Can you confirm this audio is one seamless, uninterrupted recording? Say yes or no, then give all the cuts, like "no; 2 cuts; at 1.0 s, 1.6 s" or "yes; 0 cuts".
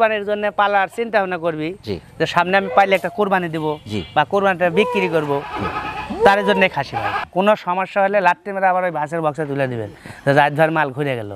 no; 1 cut; at 7.2 s